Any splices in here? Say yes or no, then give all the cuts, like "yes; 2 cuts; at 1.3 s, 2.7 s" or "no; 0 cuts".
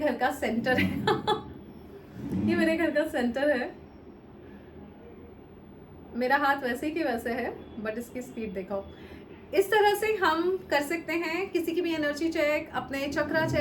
no; 0 cuts